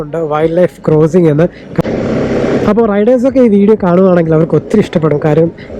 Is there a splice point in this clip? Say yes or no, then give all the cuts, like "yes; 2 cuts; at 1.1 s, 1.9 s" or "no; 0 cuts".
yes; 1 cut; at 1.6 s